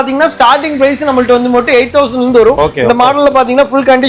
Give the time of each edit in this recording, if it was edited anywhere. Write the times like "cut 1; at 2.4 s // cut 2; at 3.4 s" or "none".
cut 1; at 2.6 s